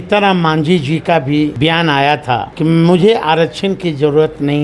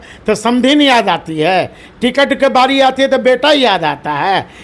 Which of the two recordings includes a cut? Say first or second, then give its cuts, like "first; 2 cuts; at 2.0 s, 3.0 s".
first; 2 cuts; at 1.5 s, 2.5 s